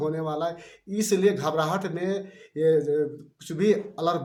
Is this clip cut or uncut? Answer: uncut